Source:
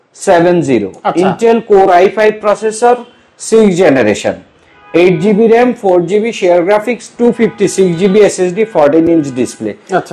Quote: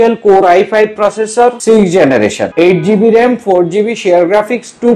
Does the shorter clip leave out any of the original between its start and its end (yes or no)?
yes